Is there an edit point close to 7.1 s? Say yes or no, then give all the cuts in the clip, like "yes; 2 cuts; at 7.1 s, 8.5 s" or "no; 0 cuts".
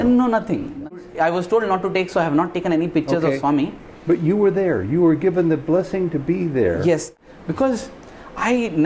yes; 2 cuts; at 0.9 s, 7.1 s